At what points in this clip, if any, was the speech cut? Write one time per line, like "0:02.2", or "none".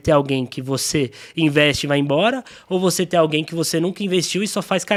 none